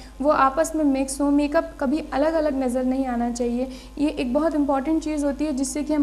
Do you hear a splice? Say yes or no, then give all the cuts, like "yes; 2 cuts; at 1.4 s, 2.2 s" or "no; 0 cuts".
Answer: no; 0 cuts